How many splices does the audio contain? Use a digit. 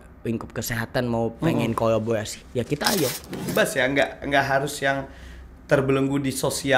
1